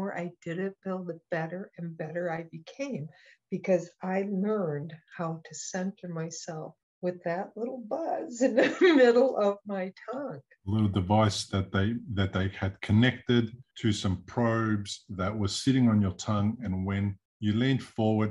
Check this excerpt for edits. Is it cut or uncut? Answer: cut